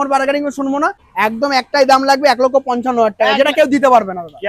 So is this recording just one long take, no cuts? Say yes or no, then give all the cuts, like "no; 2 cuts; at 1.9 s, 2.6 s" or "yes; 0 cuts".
no; 1 cut; at 1.0 s